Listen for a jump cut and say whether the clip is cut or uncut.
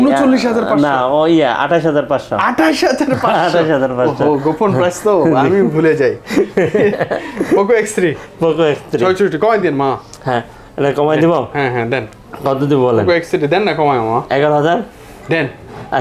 uncut